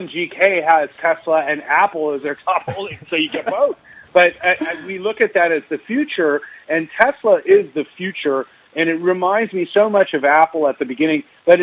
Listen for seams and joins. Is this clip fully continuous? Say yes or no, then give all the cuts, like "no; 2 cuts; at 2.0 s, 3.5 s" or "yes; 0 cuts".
yes; 0 cuts